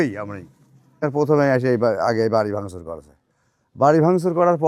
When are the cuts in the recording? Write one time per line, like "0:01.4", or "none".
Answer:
0:01.0